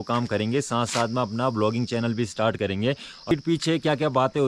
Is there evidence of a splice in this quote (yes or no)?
yes